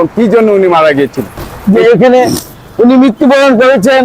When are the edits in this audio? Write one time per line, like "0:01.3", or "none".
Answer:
0:01.5

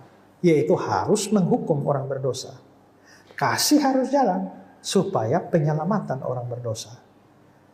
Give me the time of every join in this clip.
none

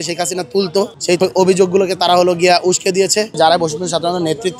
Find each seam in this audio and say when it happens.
0:01.1
0:03.4

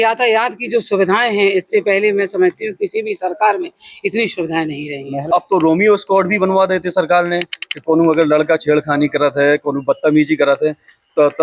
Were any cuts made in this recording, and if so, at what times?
0:05.2

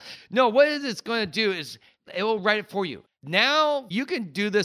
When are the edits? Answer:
0:02.0
0:03.0
0:03.9

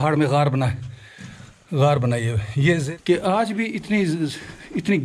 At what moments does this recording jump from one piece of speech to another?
0:02.9

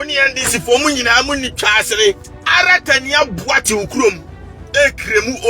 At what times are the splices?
0:02.3

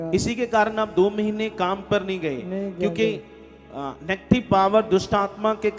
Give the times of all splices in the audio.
none

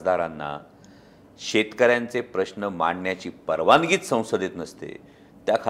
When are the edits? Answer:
none

